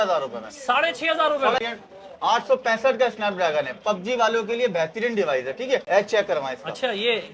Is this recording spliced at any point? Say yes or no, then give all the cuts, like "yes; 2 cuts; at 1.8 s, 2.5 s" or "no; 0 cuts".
yes; 2 cuts; at 1.6 s, 5.8 s